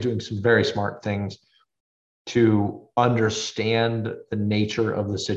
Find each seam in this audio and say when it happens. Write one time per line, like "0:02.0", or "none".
none